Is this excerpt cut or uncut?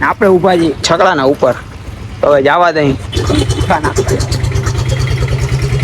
uncut